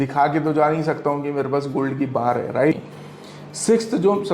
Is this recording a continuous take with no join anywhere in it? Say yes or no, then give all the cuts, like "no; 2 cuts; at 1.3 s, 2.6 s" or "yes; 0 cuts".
no; 1 cut; at 2.7 s